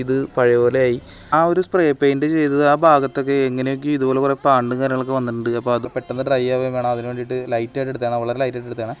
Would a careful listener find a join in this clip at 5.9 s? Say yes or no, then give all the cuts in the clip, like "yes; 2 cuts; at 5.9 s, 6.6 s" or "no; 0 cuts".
yes; 2 cuts; at 1.3 s, 5.9 s